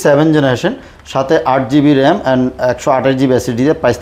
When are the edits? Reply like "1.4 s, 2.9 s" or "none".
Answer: none